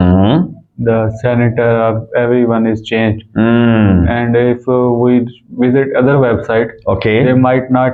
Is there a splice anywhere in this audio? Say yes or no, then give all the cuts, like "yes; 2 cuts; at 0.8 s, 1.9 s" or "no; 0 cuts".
no; 0 cuts